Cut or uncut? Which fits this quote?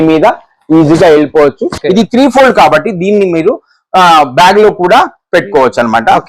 cut